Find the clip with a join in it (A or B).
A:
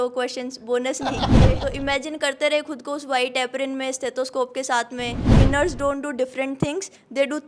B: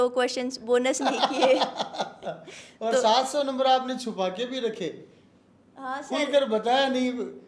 A